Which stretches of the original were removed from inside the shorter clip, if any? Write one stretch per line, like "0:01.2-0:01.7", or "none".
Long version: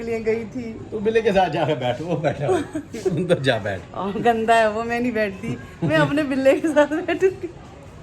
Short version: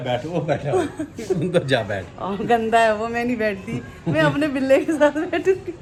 none